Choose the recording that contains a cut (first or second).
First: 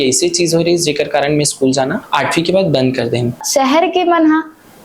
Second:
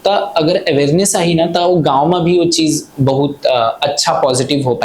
first